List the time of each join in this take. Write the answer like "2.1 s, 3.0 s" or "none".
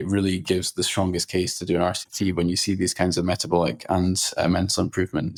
none